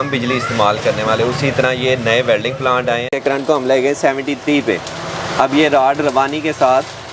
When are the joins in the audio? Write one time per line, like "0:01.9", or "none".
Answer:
0:03.1